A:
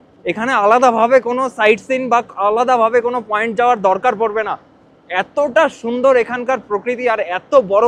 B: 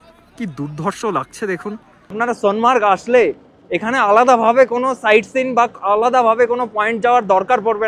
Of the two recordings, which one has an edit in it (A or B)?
B